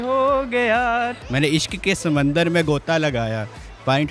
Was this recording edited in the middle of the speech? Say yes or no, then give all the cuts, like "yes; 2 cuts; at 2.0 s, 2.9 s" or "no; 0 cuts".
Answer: yes; 1 cut; at 1.2 s